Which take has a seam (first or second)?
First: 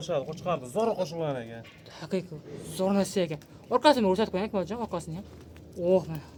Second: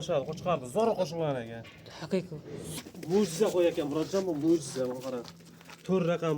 second